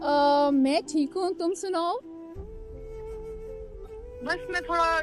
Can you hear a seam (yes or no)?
yes